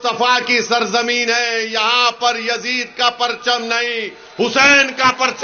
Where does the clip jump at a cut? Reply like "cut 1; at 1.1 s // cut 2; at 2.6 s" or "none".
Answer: none